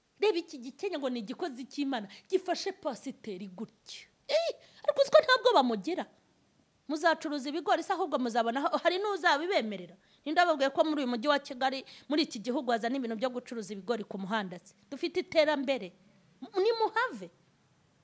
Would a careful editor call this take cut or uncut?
uncut